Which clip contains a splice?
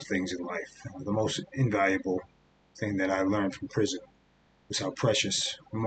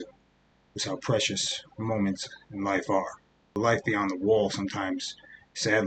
second; 1 cut; at 3.5 s

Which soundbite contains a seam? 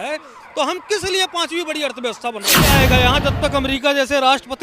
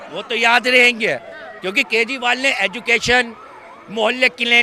first; 1 cut; at 2.7 s

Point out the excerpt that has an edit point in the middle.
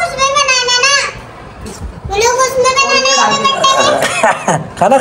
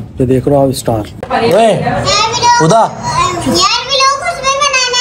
second; 1 cut; at 1.1 s

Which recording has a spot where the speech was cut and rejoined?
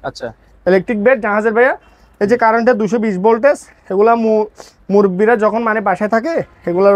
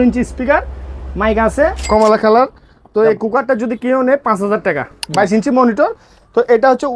second; 2 cuts; at 1.8 s, 4.9 s

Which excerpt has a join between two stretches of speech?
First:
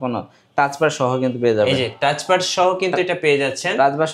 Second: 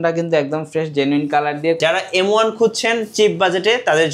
second; 1 cut; at 1.8 s

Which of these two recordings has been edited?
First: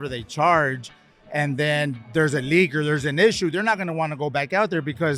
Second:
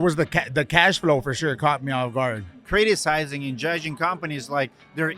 second; 1 cut; at 2.5 s

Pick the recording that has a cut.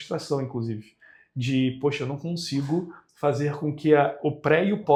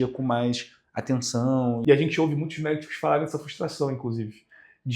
second; 1 cut; at 1.8 s

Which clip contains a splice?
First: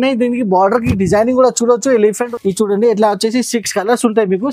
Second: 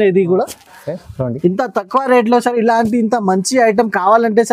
first; 1 cut; at 2.2 s

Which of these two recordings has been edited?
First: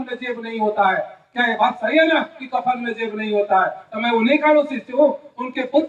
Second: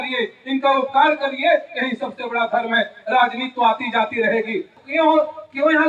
second; 1 cut; at 4.7 s

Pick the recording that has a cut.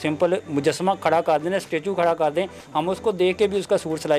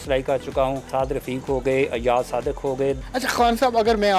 second; 2 cuts; at 0.8 s, 3.0 s

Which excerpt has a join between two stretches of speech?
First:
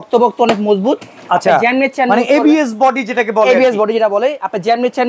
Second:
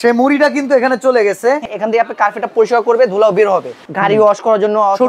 second; 2 cuts; at 1.7 s, 3.8 s

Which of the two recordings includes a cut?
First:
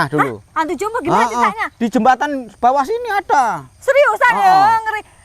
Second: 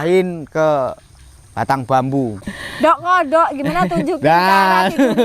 second; 1 cut; at 2.4 s

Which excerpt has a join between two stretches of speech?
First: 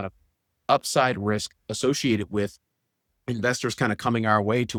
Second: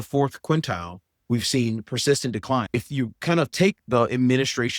second; 1 cut; at 2.7 s

